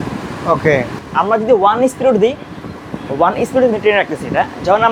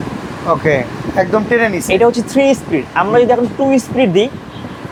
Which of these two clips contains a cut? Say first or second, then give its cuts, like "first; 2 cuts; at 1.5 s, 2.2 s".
first; 1 cut; at 1.0 s